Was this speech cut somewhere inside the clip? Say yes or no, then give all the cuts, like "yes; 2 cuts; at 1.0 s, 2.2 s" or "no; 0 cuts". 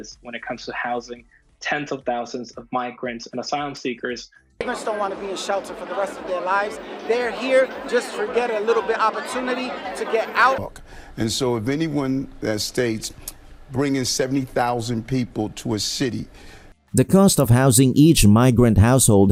no; 0 cuts